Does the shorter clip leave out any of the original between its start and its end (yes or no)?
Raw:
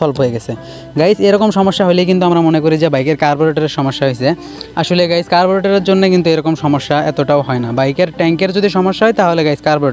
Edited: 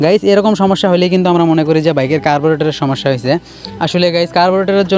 no